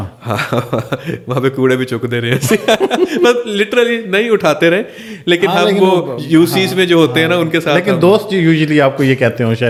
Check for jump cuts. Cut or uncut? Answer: uncut